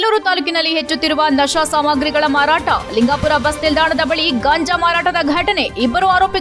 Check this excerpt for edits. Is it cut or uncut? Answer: uncut